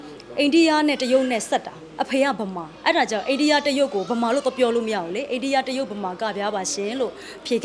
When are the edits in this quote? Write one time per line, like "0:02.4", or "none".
none

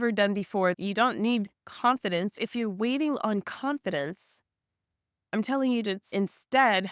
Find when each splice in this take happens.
0:00.8
0:02.4
0:06.1

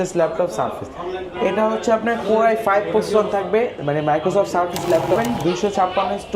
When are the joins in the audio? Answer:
0:05.2

